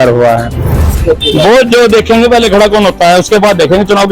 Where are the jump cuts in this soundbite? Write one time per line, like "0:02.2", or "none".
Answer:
0:01.0

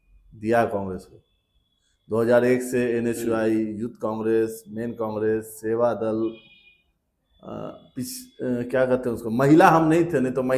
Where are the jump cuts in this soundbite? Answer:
none

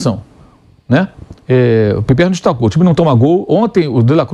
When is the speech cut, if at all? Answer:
none

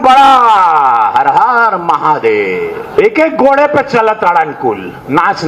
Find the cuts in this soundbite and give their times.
0:03.1

